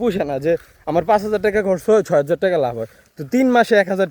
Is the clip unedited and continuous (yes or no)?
yes